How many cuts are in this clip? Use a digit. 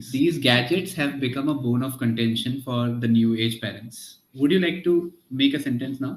1